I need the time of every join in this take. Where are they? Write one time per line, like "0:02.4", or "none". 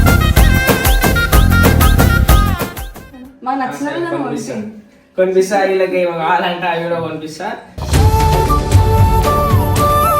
0:02.8